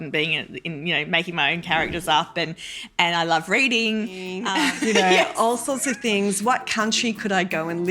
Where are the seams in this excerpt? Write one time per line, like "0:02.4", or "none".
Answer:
0:04.4